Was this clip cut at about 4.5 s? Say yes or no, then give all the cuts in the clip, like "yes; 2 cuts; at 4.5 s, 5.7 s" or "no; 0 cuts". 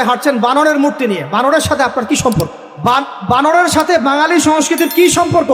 no; 1 cut; at 2.7 s